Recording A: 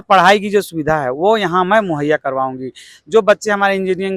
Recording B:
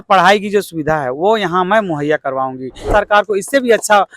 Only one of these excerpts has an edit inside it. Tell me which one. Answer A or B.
B